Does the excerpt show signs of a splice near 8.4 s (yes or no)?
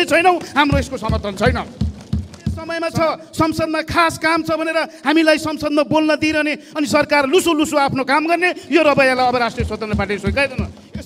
no